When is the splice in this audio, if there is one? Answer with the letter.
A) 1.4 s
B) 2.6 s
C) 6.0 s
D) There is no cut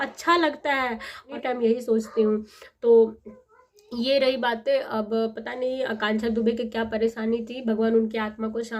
A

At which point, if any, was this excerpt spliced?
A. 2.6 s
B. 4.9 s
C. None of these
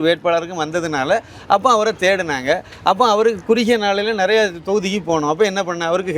C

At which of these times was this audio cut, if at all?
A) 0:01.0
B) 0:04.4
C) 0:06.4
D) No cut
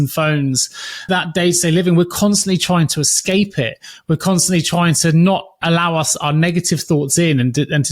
A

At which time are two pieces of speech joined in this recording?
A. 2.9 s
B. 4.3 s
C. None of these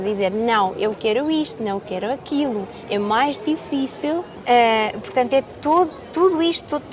B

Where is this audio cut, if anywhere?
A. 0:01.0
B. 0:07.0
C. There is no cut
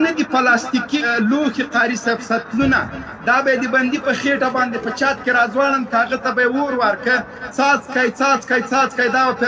A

